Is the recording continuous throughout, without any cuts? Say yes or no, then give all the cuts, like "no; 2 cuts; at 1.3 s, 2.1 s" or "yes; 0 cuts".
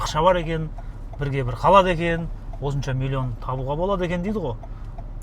yes; 0 cuts